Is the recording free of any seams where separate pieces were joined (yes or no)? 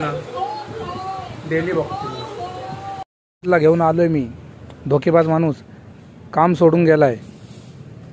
no